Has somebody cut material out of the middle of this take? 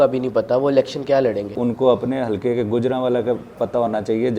yes; 1 cut; at 1.6 s

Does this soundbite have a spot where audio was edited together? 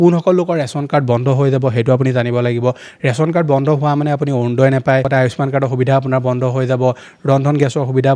no; 0 cuts

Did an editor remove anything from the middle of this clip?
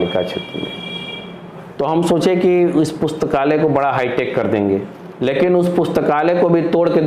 yes; 1 cut; at 4.9 s

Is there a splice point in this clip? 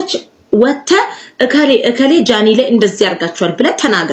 no; 0 cuts

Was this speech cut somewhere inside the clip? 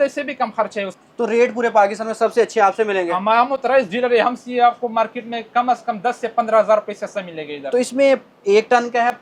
no; 0 cuts

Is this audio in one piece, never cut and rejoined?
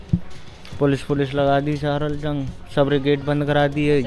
yes; 0 cuts

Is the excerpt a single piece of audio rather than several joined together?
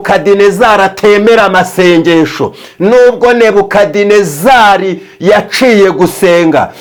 yes; 0 cuts

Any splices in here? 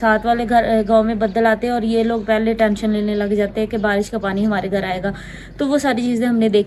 no; 0 cuts

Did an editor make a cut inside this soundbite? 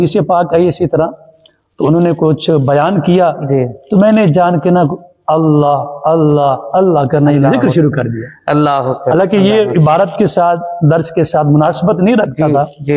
no; 0 cuts

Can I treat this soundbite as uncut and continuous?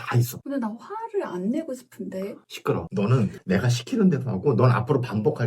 no; 1 cut; at 3.4 s

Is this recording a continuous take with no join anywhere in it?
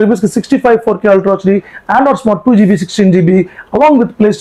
yes; 0 cuts

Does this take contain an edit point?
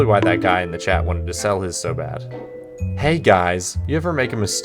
yes; 1 cut; at 2.9 s

